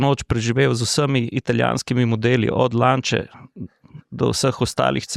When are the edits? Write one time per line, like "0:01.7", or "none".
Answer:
none